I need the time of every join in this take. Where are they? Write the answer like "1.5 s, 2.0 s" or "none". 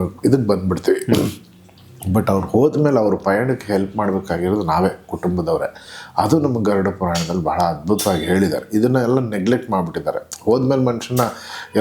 none